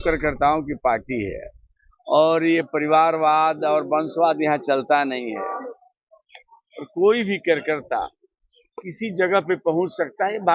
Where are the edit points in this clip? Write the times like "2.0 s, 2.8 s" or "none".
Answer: none